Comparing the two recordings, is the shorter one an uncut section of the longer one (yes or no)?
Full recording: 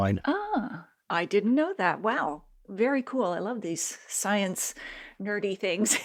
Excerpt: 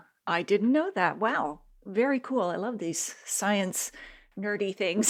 yes